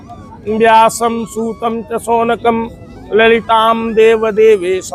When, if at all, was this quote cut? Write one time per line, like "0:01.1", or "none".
none

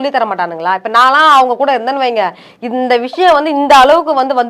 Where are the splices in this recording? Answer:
none

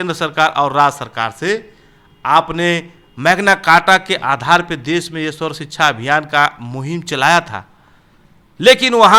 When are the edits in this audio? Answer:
none

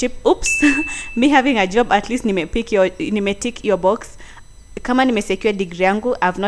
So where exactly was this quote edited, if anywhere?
none

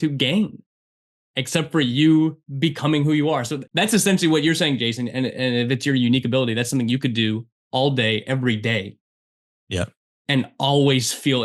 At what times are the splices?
0:02.4
0:03.6

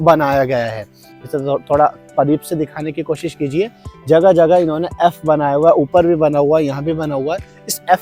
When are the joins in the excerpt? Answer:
none

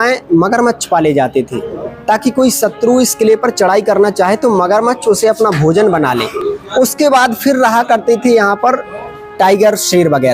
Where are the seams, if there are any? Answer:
none

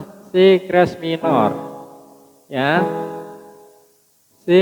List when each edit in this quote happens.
none

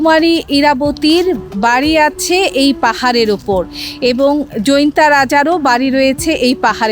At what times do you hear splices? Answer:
none

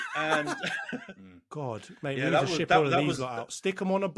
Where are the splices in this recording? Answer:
0:01.1

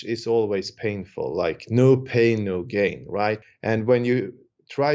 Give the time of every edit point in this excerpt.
0:03.5

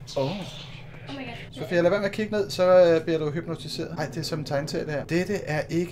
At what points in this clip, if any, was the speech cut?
0:01.5
0:03.9
0:05.1

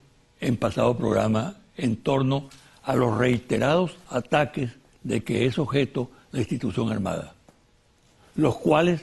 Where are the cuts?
none

